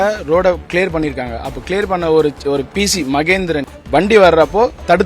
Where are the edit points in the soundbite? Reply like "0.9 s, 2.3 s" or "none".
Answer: 3.6 s

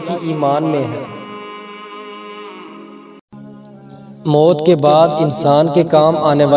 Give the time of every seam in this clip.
3.2 s

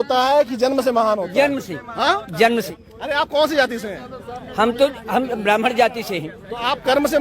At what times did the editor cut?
2.7 s

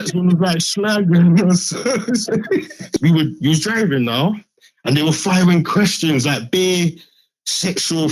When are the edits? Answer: 3.0 s

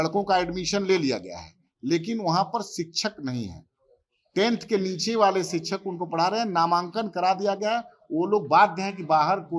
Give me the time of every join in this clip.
none

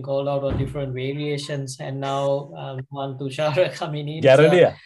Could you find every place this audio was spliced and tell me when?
none

